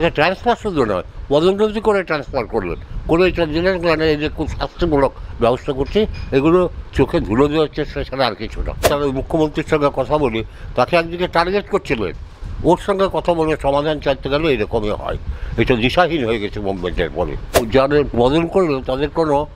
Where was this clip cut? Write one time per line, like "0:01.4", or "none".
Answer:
0:08.8
0:17.7